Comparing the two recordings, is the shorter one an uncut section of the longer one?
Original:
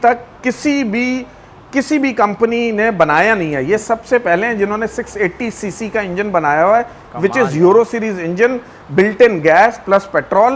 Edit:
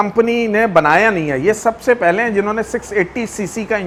yes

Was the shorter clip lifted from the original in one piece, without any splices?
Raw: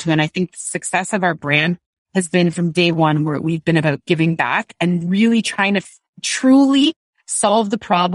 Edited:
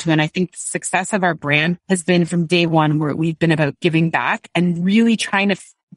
no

